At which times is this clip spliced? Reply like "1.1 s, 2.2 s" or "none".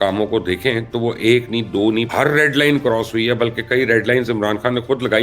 2.1 s